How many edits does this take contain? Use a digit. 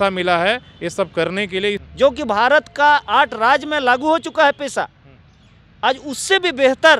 1